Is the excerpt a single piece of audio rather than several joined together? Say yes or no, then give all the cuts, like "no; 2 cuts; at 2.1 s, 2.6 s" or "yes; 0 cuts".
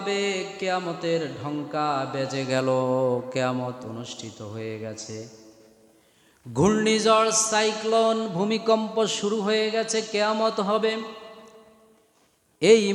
yes; 0 cuts